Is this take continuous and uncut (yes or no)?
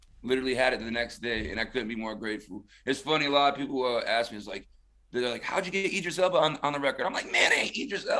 yes